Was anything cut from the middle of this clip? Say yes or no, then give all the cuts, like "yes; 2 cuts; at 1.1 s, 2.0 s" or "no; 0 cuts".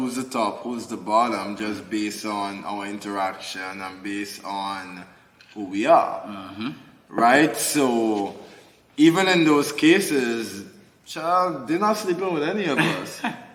no; 0 cuts